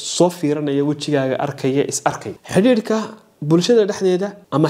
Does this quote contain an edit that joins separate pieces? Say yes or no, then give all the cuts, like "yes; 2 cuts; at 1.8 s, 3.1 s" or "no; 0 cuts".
yes; 1 cut; at 2.3 s